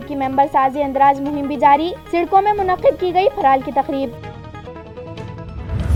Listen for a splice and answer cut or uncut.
uncut